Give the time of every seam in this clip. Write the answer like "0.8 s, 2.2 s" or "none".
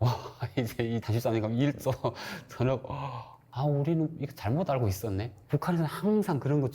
1.1 s, 3.4 s, 4.4 s